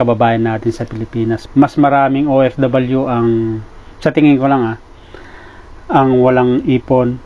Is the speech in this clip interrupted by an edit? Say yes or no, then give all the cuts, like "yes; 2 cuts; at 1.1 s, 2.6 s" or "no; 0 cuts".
yes; 1 cut; at 1.4 s